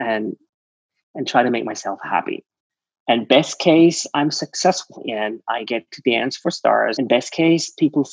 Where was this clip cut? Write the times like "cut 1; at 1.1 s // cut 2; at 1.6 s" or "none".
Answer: cut 1; at 5.0 s // cut 2; at 6.9 s